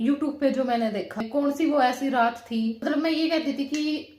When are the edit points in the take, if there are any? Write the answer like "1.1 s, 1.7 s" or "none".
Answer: 1.2 s, 2.8 s